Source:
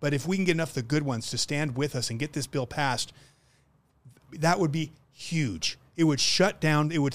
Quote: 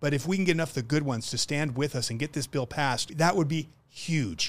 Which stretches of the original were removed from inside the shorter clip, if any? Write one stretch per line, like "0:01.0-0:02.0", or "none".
0:03.1-0:04.3